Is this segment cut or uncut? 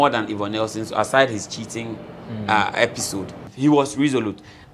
cut